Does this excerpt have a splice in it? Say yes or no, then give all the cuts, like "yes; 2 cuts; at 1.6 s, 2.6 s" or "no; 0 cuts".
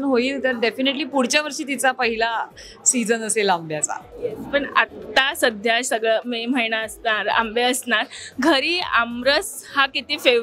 no; 0 cuts